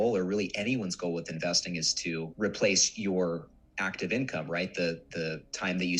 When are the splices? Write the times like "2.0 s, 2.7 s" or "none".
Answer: none